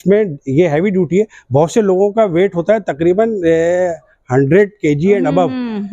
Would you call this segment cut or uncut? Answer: uncut